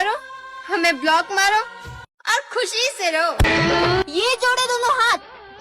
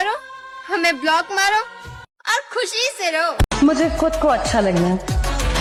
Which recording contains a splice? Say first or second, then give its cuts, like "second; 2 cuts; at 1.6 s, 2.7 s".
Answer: first; 1 cut; at 3.4 s